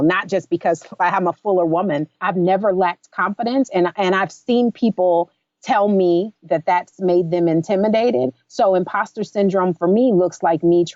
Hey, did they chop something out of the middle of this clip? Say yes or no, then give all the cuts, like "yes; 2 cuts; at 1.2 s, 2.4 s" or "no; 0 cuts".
yes; 1 cut; at 2.2 s